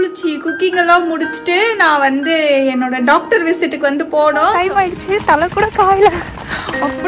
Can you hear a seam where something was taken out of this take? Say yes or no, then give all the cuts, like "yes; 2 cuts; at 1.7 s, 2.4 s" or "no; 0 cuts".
yes; 1 cut; at 4.5 s